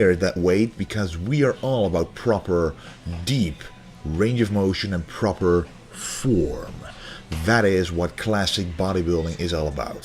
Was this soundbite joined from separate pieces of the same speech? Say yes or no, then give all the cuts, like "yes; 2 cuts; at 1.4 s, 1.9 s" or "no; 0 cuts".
yes; 1 cut; at 8.1 s